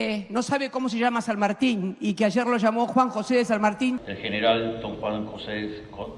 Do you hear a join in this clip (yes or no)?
no